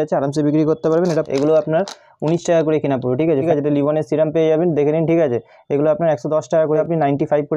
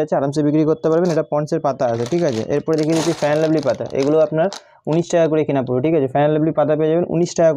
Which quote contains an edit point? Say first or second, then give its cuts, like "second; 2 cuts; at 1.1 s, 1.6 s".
first; 3 cuts; at 1.3 s, 3.4 s, 6.8 s